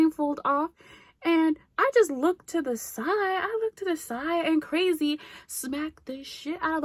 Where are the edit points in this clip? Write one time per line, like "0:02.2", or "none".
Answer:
none